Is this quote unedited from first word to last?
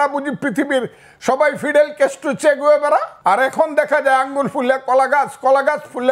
no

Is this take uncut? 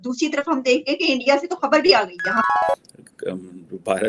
no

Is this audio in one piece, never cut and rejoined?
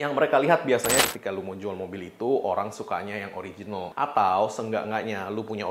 no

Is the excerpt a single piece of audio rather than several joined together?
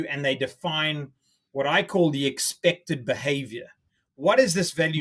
yes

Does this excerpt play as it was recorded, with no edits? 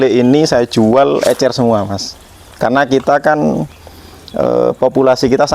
yes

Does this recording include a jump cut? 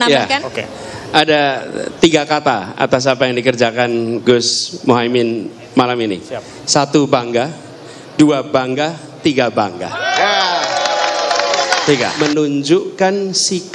yes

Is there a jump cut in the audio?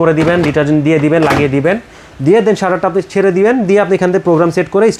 no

